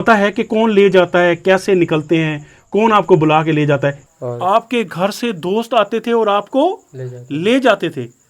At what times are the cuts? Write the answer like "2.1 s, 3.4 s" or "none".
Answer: 4.0 s